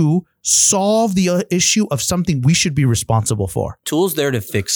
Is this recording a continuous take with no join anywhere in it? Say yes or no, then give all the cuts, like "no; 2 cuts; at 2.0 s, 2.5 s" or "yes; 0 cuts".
no; 1 cut; at 3.8 s